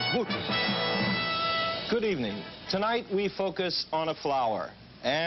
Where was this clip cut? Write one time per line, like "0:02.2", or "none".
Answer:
0:04.0